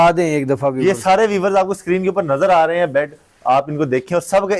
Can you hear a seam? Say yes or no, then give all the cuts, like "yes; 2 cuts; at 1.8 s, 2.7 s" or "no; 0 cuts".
no; 0 cuts